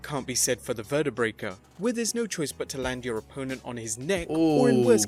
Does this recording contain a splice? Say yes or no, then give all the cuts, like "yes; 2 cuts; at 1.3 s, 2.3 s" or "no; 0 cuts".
no; 0 cuts